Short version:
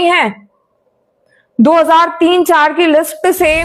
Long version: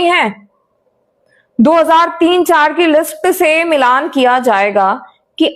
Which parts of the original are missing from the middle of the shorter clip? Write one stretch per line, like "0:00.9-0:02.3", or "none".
none